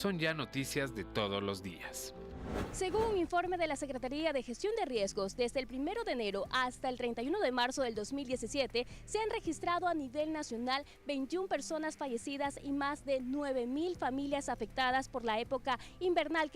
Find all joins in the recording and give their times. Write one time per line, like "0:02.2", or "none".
0:02.7